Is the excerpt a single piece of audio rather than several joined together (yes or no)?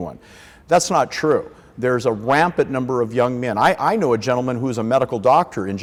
yes